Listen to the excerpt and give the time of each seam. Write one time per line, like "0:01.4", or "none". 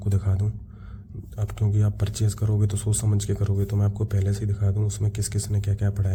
none